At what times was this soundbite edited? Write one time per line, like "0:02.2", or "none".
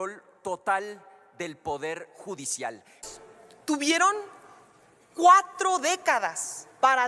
0:03.0